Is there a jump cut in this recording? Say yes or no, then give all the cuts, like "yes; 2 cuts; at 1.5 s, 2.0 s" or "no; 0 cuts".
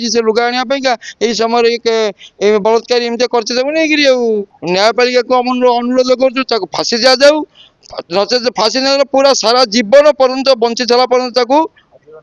yes; 1 cut; at 4.5 s